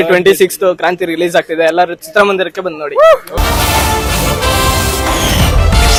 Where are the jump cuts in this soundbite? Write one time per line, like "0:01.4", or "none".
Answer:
none